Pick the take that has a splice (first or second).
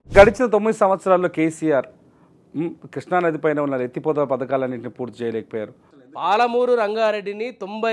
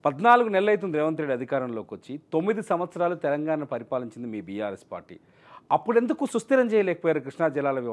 first